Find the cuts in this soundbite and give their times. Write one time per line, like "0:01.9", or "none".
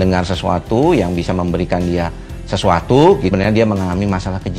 0:03.3